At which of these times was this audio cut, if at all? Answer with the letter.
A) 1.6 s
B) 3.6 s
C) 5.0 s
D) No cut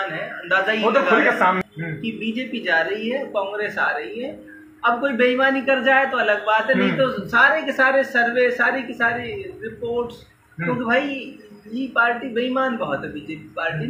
A